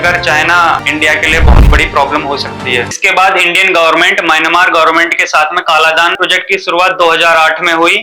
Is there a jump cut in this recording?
yes; 3 cuts; at 0.8 s, 3.0 s, 6.2 s

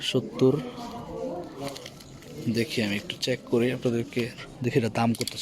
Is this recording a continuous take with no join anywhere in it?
no; 1 cut; at 4.4 s

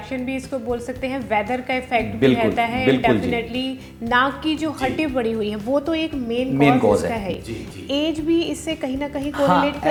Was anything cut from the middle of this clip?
no; 0 cuts

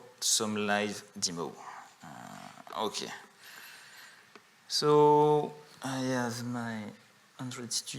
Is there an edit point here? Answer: no; 0 cuts

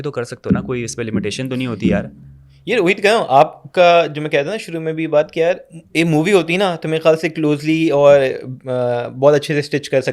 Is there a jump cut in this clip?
no; 0 cuts

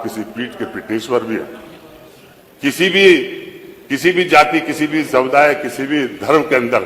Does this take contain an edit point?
no; 0 cuts

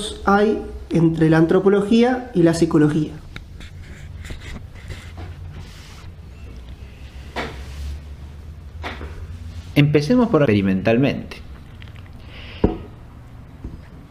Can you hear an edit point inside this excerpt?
no; 0 cuts

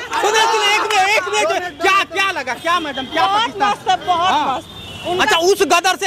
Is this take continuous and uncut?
yes; 0 cuts

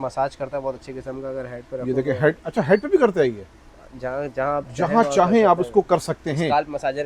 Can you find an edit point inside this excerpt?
no; 0 cuts

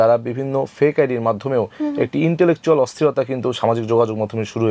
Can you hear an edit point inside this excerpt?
no; 0 cuts

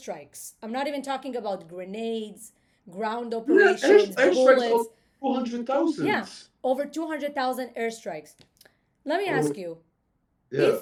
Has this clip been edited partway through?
no; 0 cuts

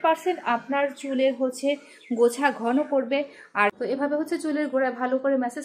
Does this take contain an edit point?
yes; 1 cut; at 3.8 s

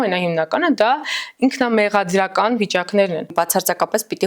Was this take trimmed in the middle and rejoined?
yes; 1 cut; at 3.3 s

